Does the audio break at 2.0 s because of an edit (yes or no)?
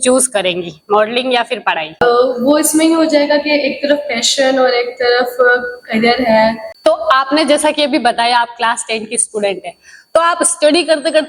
yes